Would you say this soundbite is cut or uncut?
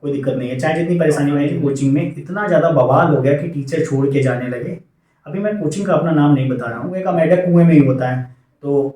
cut